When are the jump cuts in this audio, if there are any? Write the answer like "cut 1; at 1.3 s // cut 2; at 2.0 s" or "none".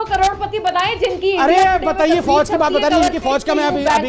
none